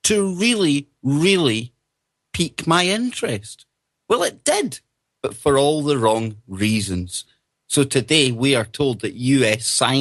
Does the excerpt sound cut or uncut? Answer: uncut